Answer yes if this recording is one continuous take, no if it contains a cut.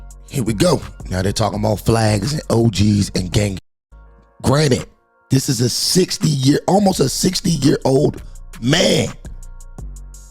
no